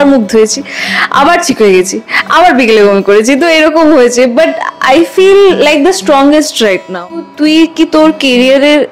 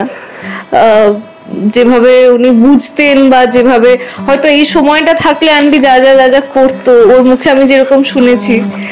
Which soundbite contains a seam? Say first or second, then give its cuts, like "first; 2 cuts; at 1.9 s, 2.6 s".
first; 1 cut; at 7.3 s